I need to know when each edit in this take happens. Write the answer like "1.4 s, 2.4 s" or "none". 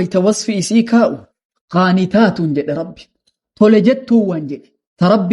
1.3 s